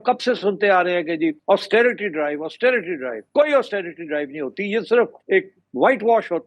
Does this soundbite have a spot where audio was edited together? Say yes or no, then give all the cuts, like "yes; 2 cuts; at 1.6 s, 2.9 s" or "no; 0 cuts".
no; 0 cuts